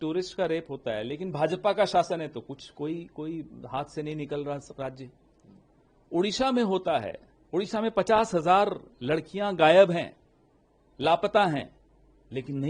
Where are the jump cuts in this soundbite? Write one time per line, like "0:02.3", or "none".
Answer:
none